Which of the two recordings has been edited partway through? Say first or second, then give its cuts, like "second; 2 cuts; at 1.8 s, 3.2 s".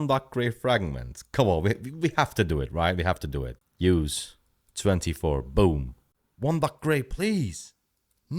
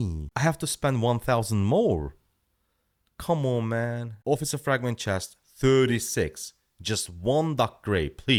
first; 1 cut; at 3.5 s